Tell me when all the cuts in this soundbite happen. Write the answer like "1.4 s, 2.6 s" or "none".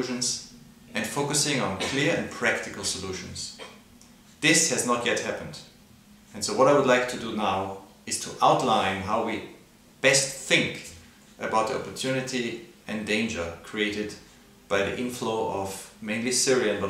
1.3 s